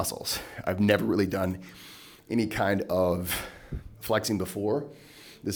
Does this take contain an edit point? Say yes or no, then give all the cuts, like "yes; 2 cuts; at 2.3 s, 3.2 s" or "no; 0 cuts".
no; 0 cuts